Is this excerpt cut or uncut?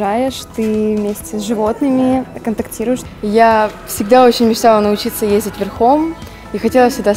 cut